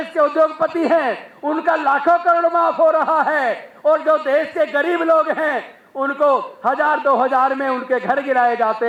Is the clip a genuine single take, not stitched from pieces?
yes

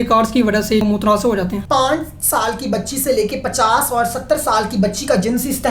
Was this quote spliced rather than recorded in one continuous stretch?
yes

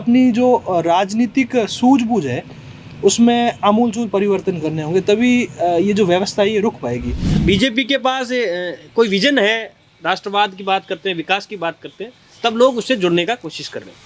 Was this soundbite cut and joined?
yes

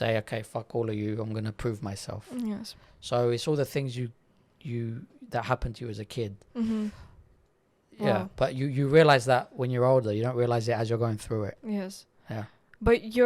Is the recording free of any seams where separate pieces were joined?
yes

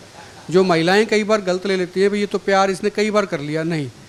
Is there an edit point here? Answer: no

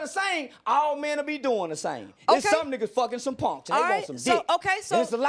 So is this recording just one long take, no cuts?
no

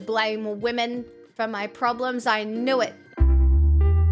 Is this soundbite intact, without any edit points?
no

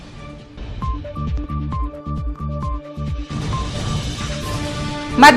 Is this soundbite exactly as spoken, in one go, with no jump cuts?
yes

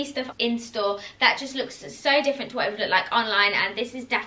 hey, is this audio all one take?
yes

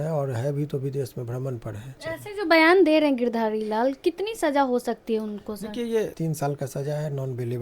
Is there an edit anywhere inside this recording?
yes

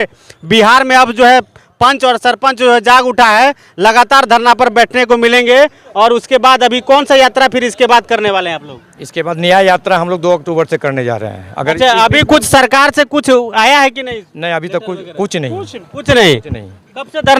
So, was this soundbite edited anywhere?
no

